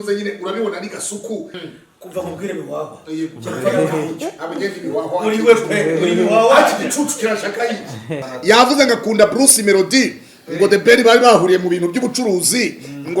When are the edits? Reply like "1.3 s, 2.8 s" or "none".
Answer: 1.5 s, 8.2 s